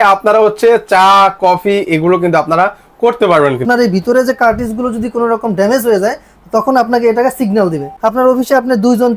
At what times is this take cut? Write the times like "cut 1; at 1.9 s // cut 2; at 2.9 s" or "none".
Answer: cut 1; at 3.6 s // cut 2; at 7.9 s